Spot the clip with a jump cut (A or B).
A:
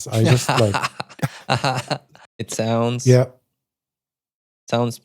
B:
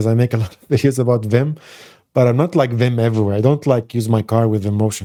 A